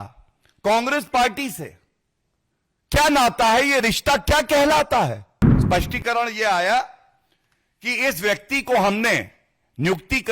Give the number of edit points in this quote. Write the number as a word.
one